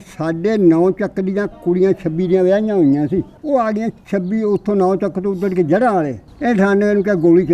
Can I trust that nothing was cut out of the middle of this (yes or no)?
no